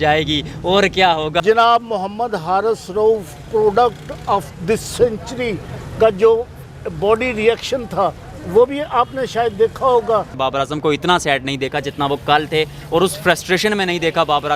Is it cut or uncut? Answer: cut